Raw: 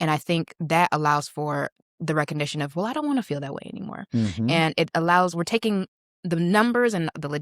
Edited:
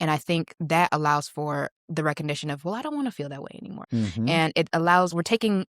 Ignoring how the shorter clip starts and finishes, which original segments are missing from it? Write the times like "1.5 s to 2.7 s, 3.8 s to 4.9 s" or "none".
1.8 s to 1.9 s, 3.9 s to 4.0 s